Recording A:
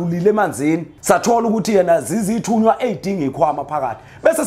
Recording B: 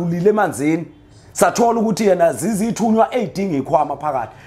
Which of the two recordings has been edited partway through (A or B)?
A